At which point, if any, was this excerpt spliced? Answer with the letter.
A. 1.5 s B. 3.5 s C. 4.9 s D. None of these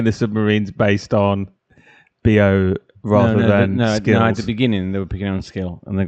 D